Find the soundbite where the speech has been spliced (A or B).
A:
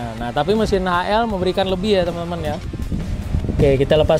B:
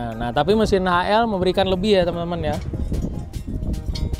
A